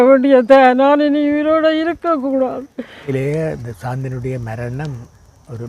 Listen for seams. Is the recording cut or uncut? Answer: cut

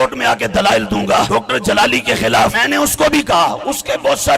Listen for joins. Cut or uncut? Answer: cut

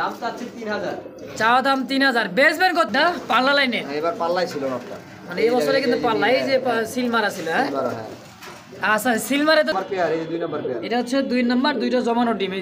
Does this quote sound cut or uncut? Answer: cut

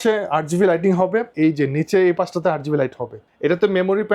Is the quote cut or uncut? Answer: cut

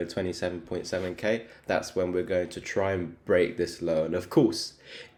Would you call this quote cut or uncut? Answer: uncut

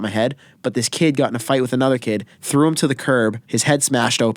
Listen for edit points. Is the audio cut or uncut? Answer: cut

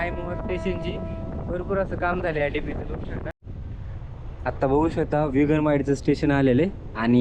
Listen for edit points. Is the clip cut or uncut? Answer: cut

